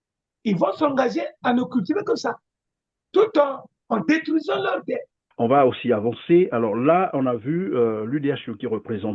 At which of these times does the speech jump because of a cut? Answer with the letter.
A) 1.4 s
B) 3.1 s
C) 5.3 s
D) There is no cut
C